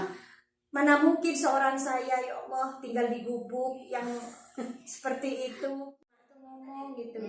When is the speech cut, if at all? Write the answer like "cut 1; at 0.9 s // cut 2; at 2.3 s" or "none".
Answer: cut 1; at 6.0 s